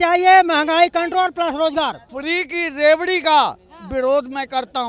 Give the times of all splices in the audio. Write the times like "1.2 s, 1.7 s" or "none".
2.1 s